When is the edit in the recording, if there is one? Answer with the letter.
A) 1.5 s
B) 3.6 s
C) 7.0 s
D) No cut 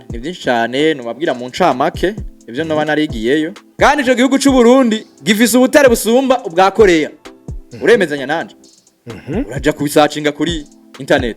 B